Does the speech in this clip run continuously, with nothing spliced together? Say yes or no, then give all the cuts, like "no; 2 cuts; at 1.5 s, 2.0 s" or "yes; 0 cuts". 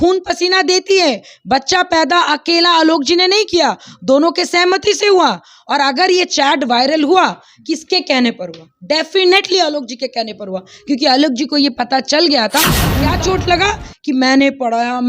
no; 1 cut; at 12.9 s